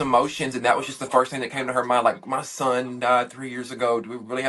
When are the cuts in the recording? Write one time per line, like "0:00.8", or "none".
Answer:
none